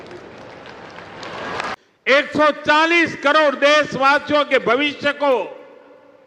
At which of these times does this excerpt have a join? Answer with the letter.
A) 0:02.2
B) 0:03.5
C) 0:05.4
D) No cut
A